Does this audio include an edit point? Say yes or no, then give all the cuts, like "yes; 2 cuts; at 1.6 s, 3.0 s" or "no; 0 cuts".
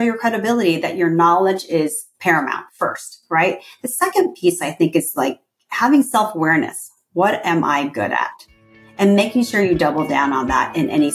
no; 0 cuts